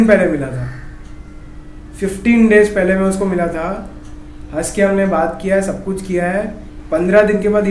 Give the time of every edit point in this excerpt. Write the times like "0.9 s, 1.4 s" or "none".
none